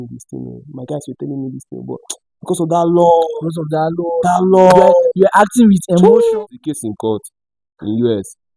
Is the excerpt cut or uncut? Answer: cut